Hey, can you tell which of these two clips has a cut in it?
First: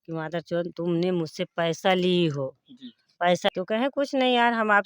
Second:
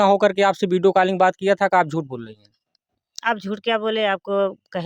first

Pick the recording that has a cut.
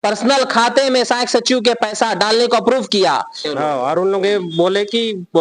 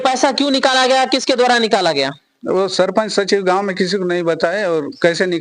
first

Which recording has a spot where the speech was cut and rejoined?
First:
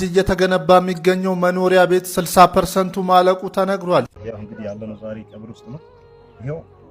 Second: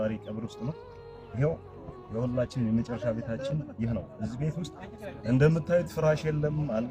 first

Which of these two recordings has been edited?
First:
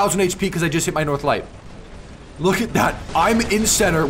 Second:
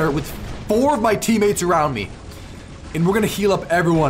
first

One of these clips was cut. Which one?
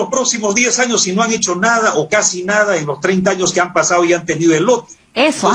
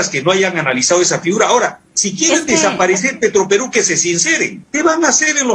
second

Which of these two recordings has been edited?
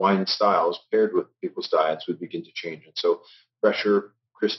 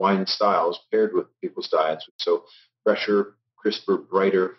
second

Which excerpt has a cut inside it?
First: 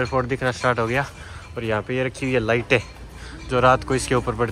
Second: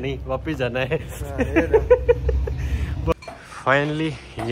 second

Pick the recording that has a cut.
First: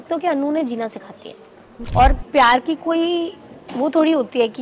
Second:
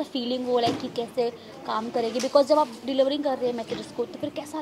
first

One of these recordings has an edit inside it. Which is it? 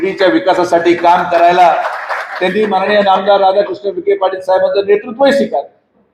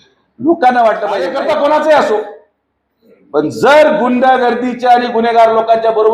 second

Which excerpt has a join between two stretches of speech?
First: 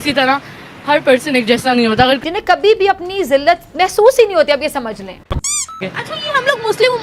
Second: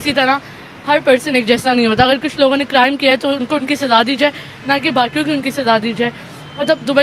first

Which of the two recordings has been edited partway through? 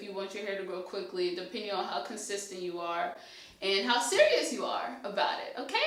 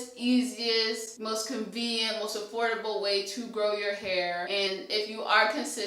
second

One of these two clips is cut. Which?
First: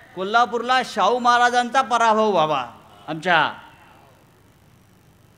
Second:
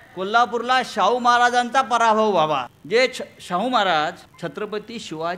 second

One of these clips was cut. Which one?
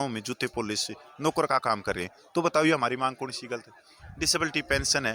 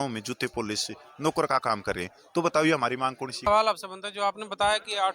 second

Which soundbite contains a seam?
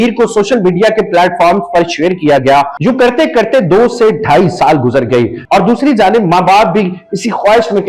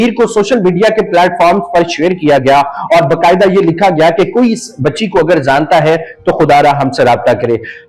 first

